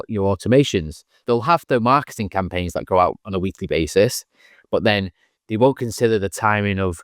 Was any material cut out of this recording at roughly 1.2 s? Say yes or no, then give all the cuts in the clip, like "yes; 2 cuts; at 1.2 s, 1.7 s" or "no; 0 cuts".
yes; 1 cut; at 1.2 s